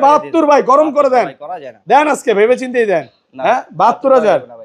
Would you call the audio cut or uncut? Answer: uncut